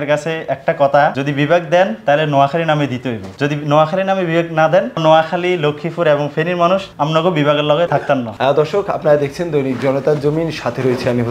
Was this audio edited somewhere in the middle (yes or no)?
no